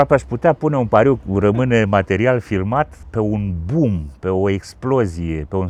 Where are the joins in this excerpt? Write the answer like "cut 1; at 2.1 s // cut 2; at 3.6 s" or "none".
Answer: none

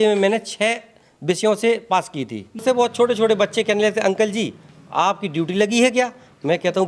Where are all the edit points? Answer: cut 1; at 2.6 s

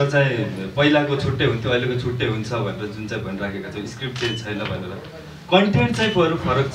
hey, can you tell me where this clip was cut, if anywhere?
none

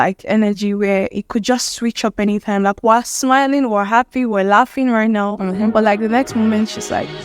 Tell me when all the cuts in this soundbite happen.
none

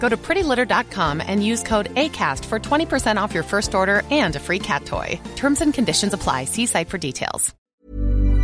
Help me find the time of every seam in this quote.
cut 1; at 7.5 s

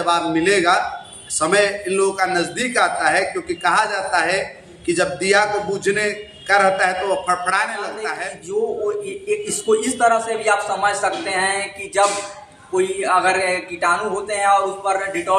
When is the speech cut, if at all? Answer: cut 1; at 8.1 s

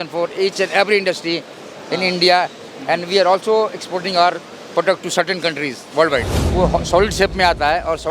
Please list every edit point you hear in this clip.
cut 1; at 6.4 s

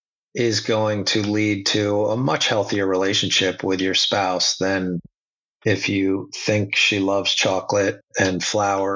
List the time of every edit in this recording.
none

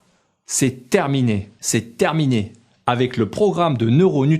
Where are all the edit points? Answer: cut 1; at 1.5 s

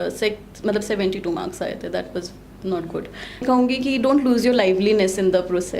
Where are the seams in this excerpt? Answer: cut 1; at 3.4 s

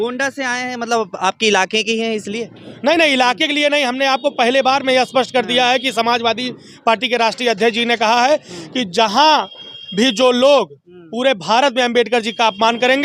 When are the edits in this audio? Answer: none

